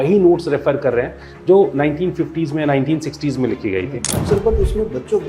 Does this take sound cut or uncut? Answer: cut